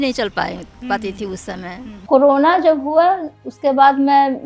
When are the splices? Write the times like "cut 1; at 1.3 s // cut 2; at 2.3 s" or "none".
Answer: cut 1; at 2.0 s